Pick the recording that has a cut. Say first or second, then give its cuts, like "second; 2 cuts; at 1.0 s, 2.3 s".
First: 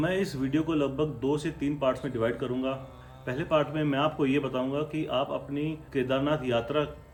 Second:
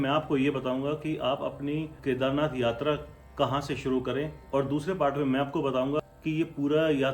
second; 2 cuts; at 4.4 s, 6.1 s